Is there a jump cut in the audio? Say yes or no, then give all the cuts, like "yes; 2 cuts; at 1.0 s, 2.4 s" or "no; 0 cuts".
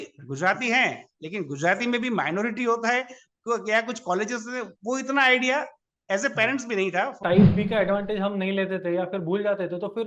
yes; 1 cut; at 7.3 s